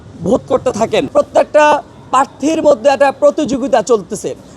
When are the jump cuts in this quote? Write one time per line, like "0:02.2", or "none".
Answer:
0:01.1